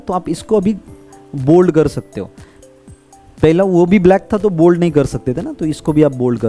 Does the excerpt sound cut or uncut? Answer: uncut